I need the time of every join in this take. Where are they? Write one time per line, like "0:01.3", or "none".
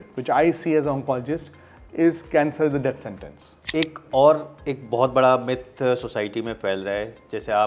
0:03.5